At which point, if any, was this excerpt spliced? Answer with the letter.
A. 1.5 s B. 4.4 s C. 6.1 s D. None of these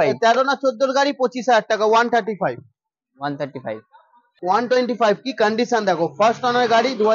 B